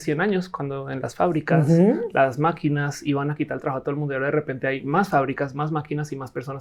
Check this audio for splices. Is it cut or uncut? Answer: uncut